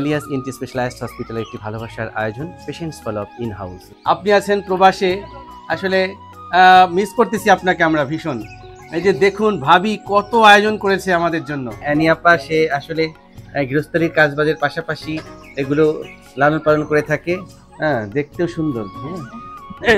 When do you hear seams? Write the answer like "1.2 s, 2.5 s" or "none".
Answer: 3.9 s, 11.7 s